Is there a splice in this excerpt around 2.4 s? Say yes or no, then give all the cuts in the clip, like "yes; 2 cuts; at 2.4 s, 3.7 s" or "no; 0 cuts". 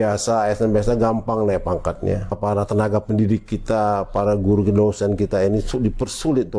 yes; 1 cut; at 2.4 s